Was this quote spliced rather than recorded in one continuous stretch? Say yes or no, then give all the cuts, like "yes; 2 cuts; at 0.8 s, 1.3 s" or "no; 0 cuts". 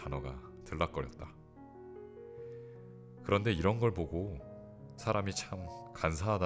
no; 0 cuts